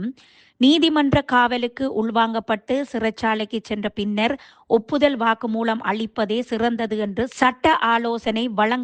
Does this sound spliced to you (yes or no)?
no